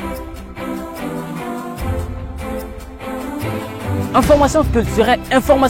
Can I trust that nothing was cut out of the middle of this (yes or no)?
yes